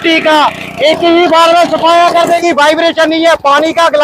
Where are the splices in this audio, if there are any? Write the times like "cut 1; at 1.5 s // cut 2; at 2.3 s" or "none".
cut 1; at 2.4 s